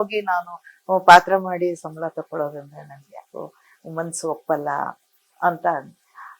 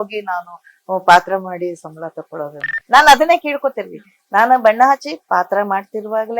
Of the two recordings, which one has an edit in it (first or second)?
second